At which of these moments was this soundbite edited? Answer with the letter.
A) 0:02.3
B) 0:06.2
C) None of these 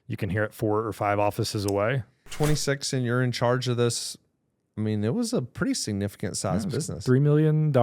A